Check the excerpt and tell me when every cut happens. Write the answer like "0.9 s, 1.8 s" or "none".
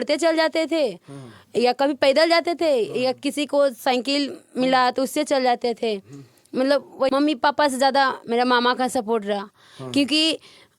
7.1 s